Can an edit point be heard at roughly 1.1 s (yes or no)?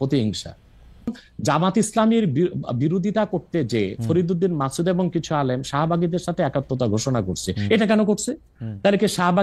yes